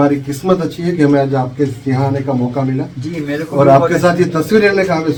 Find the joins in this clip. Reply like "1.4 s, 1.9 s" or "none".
none

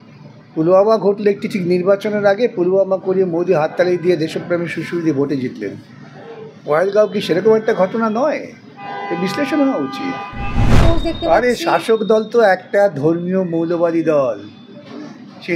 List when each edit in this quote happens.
10.7 s

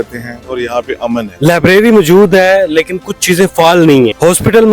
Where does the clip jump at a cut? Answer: 1.3 s

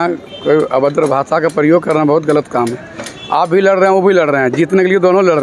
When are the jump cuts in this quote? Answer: none

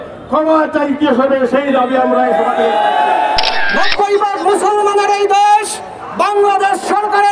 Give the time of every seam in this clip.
3.5 s

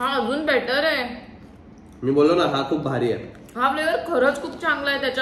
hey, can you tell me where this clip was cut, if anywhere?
none

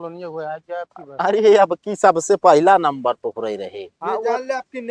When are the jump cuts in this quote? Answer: none

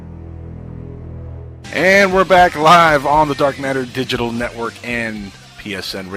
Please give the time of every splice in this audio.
1.4 s

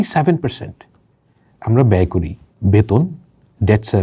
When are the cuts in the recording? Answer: 2.4 s

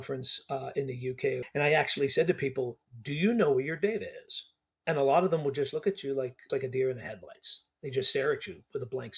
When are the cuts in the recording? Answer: 1.5 s, 6.5 s

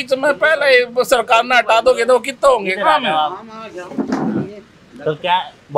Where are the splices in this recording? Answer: none

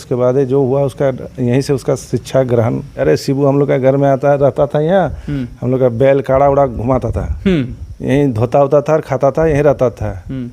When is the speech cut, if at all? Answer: 2.9 s

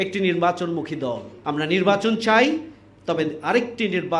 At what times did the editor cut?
1.3 s

